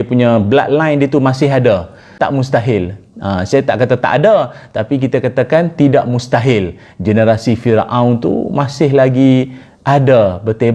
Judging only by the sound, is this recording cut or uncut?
cut